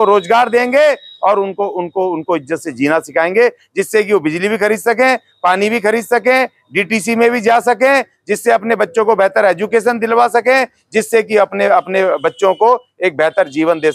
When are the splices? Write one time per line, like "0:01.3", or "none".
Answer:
none